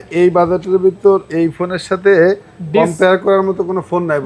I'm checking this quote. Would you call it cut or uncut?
uncut